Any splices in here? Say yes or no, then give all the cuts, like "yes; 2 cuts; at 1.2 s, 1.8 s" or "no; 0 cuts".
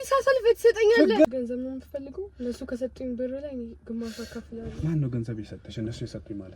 yes; 1 cut; at 1.2 s